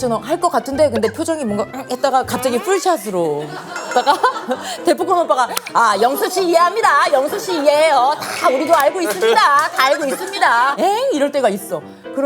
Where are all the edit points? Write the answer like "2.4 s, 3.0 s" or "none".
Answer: 10.7 s